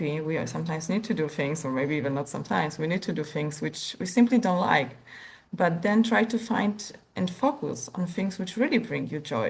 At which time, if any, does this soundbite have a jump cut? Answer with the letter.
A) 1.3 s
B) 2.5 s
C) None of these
C